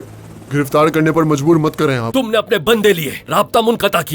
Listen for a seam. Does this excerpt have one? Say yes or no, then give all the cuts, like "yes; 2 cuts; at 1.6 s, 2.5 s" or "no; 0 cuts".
yes; 1 cut; at 2.0 s